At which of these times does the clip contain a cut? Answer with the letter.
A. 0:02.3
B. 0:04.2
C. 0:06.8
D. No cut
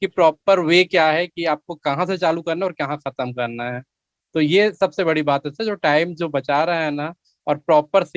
D